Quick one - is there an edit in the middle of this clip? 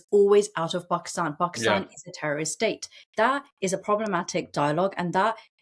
no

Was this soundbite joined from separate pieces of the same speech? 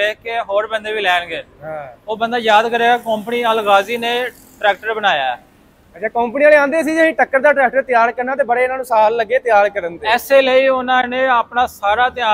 no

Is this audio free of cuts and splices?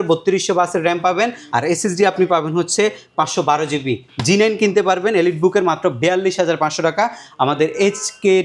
yes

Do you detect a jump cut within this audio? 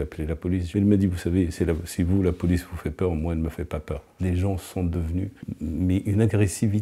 yes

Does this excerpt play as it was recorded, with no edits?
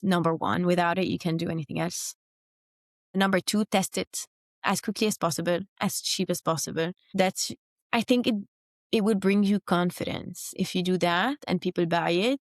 no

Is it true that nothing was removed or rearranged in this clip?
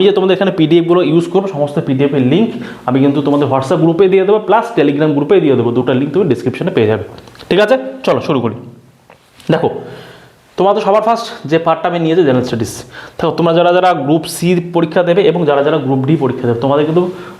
yes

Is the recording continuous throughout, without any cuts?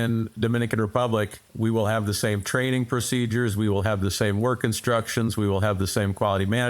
no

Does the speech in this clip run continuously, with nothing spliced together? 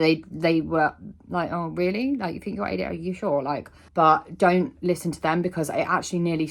no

